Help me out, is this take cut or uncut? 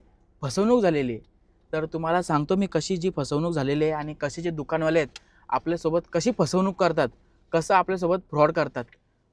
uncut